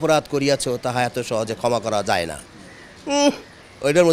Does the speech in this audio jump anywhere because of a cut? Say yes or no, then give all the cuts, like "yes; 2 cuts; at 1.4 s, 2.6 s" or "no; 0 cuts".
no; 0 cuts